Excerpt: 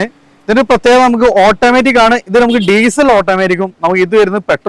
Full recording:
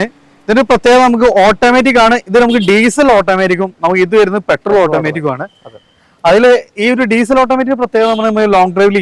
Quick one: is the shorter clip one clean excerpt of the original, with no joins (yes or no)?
yes